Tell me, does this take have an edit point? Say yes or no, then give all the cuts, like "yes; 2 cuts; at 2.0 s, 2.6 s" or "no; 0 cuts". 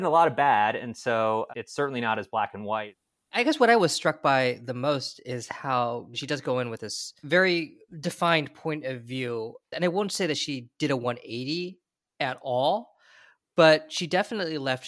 yes; 5 cuts; at 1.6 s, 3.4 s, 6.2 s, 7.2 s, 9.7 s